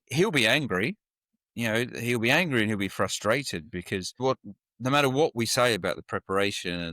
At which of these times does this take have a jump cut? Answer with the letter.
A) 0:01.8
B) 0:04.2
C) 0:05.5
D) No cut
B